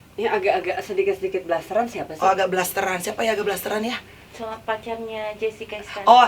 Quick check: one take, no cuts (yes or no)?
yes